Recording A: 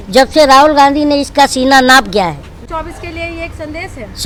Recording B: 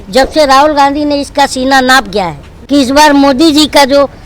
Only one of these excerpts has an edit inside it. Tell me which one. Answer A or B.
B